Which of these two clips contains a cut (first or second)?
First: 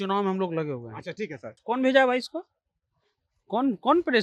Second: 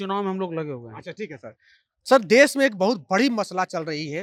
first